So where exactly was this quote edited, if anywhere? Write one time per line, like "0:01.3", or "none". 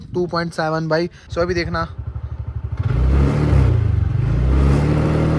0:01.2